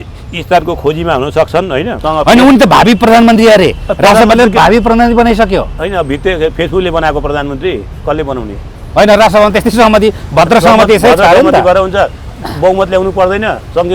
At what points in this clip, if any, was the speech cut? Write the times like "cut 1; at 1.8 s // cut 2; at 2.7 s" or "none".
cut 1; at 1.9 s